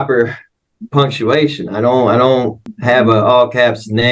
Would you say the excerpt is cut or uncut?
cut